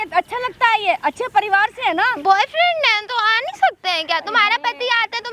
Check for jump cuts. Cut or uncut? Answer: uncut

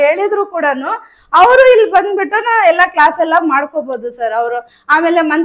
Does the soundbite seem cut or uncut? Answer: uncut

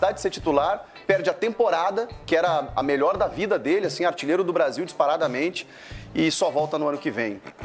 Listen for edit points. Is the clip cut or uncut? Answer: uncut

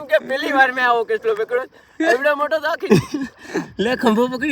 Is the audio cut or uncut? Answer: cut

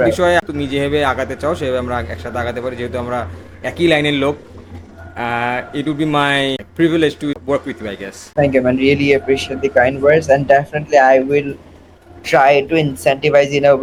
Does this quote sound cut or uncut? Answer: uncut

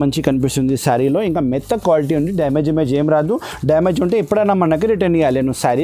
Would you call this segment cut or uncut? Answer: uncut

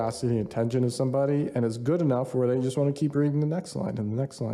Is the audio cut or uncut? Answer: uncut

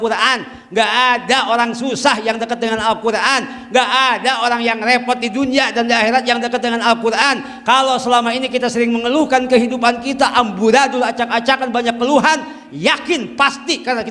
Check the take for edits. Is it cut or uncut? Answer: uncut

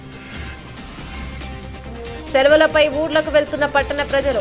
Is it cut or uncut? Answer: cut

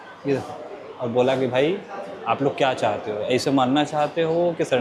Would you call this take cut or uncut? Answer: uncut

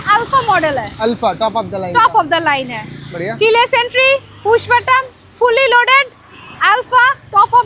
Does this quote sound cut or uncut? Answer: uncut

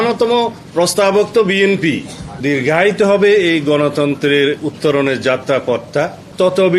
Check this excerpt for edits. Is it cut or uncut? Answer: cut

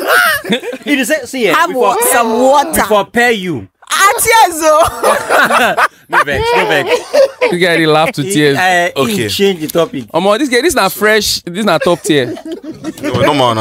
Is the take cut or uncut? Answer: uncut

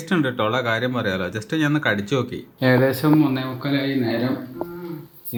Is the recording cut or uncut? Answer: uncut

